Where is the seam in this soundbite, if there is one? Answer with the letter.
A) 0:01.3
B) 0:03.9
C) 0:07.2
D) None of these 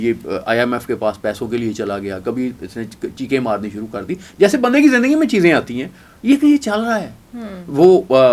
D